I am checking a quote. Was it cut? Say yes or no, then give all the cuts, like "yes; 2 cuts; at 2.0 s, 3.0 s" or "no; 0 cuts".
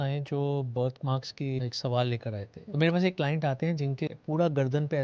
yes; 3 cuts; at 1.6 s, 2.7 s, 4.1 s